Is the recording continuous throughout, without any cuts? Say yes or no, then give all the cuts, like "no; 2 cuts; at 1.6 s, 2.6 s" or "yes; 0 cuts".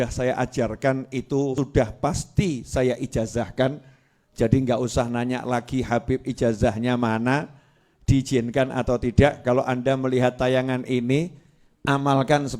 no; 1 cut; at 1.5 s